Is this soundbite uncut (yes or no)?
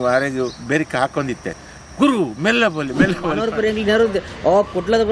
no